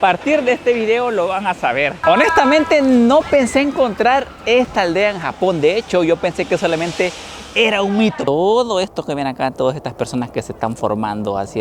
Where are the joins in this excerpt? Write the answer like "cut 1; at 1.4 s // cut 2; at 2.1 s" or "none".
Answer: cut 1; at 2.0 s // cut 2; at 8.2 s